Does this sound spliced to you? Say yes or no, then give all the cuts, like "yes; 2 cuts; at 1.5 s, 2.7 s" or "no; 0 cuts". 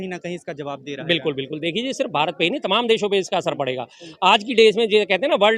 no; 0 cuts